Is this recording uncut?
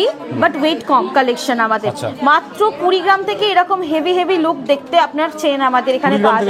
yes; 0 cuts

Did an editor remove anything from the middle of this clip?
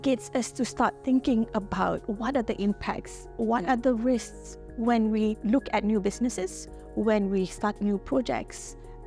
no; 0 cuts

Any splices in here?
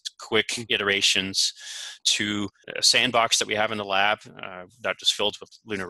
yes; 1 cut; at 2.7 s

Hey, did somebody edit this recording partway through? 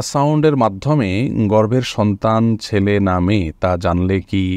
no; 0 cuts

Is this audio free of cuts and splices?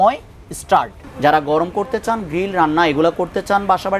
no; 1 cut; at 1.0 s

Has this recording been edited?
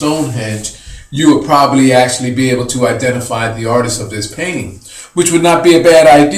yes; 1 cut; at 4.1 s

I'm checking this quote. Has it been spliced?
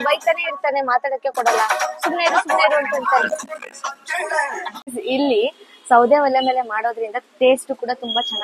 yes; 1 cut; at 4.9 s

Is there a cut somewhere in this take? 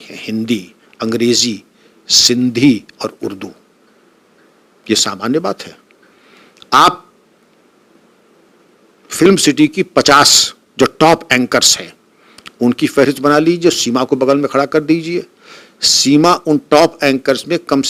no; 0 cuts

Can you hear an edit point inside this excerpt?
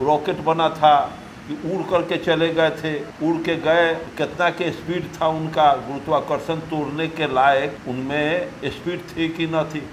no; 0 cuts

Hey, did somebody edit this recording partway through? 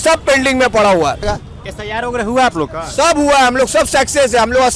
yes; 1 cut; at 1.2 s

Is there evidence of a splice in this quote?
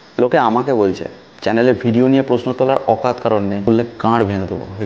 yes; 1 cut; at 3.7 s

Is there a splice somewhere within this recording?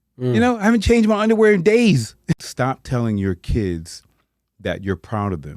yes; 1 cut; at 2.4 s

